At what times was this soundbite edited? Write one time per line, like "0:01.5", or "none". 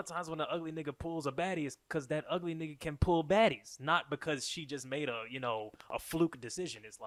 none